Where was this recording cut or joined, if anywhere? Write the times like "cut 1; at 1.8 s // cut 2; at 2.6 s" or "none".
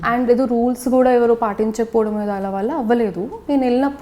none